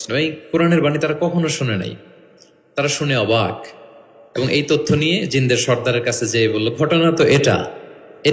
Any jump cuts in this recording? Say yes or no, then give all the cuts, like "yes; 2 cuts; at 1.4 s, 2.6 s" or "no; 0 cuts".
no; 0 cuts